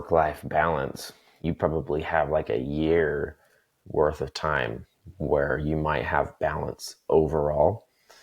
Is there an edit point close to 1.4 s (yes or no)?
yes